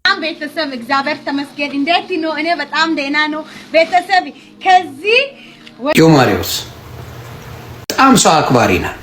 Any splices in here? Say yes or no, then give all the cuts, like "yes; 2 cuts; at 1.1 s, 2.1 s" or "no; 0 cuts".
yes; 2 cuts; at 5.9 s, 7.9 s